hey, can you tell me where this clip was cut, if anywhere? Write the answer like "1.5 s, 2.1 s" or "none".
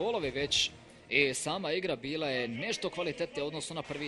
none

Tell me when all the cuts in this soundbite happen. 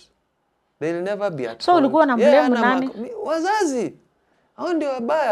none

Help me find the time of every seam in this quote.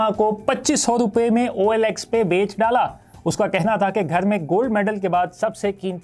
none

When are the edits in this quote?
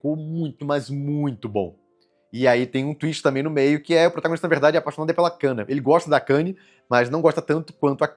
none

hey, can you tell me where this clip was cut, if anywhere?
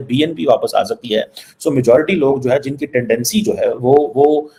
none

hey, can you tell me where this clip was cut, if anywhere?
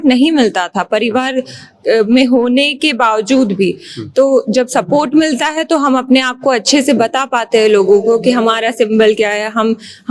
none

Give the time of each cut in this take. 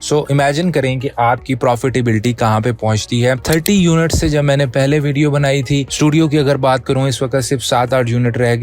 3.4 s

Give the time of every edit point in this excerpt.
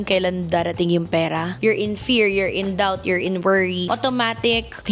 1.6 s

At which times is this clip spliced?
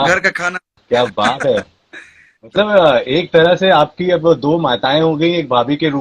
none

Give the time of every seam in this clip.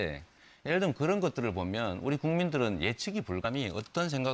none

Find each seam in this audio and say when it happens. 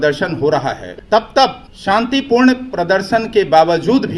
0.9 s, 1.7 s

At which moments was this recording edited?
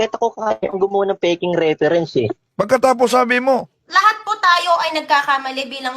2.4 s, 3.8 s

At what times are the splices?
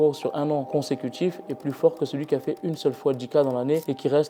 none

